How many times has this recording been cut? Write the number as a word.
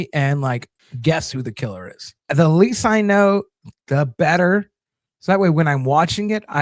one